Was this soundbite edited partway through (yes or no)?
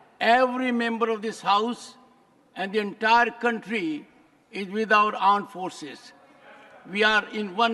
no